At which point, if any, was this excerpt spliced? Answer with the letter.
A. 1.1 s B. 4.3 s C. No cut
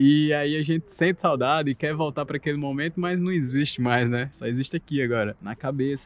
C